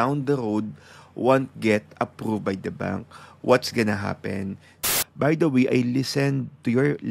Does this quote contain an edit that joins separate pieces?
yes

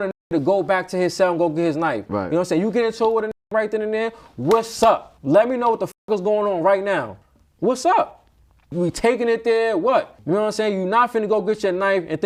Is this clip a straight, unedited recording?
yes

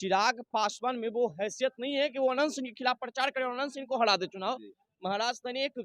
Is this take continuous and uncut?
yes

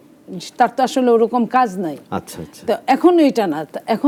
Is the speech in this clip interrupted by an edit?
no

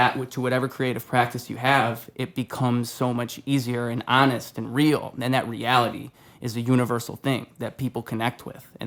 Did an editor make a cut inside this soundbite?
no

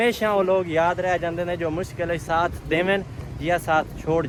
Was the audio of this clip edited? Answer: no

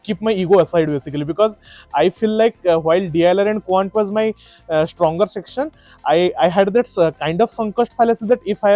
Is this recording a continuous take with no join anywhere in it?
yes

